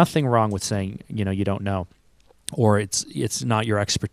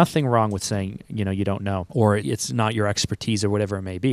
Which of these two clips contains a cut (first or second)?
second